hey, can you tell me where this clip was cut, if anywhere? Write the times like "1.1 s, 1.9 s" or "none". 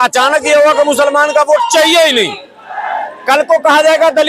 none